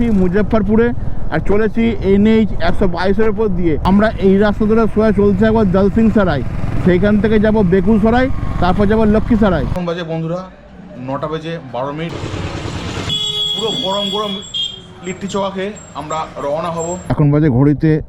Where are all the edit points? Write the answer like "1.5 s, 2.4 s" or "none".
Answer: 3.8 s, 9.7 s, 12.1 s, 13.1 s, 17.0 s

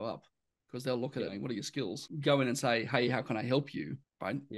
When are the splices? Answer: 2.1 s

